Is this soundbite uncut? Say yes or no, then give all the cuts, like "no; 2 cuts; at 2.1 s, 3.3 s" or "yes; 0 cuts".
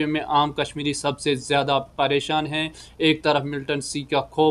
yes; 0 cuts